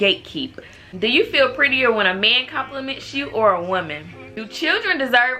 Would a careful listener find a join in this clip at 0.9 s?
yes; 2 cuts; at 0.9 s, 4.5 s

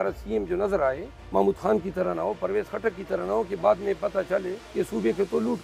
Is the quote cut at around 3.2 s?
no; 2 cuts; at 1.1 s, 4.6 s

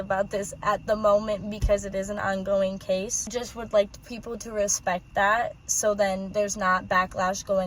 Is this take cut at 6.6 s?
no; 1 cut; at 3.3 s

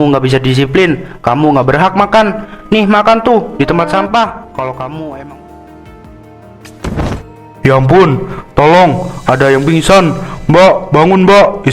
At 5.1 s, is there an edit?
yes; 1 cut; at 5.1 s

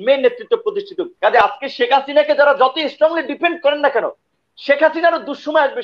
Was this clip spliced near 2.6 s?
no; 1 cut; at 1.0 s

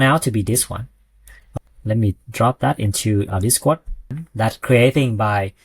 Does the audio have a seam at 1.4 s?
yes; 2 cuts; at 1.4 s, 4.0 s

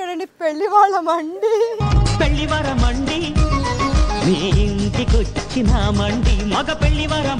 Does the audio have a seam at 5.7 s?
no; 1 cut; at 1.8 s

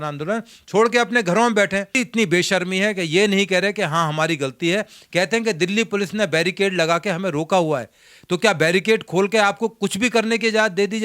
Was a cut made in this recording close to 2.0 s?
yes; 1 cut; at 2.0 s

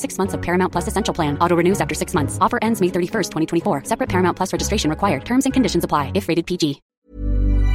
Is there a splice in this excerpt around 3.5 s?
no; 1 cut; at 6.9 s

